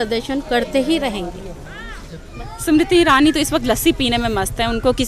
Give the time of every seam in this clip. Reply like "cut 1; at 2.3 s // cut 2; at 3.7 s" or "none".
cut 1; at 2.2 s